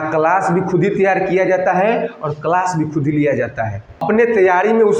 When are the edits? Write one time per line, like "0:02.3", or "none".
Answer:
0:04.0